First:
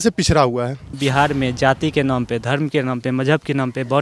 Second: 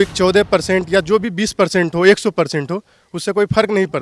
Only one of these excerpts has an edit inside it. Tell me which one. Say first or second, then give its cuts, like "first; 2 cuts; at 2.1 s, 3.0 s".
first; 1 cut; at 1.0 s